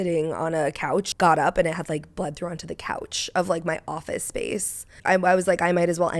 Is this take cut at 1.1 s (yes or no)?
yes